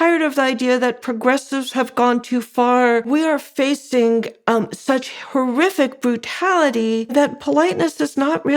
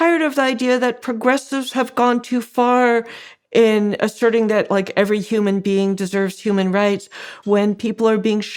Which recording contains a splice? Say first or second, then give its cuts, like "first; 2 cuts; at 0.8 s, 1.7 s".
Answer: first; 2 cuts; at 3.1 s, 7.1 s